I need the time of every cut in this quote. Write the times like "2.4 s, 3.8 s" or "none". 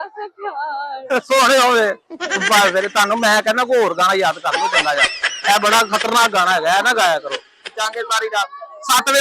7.7 s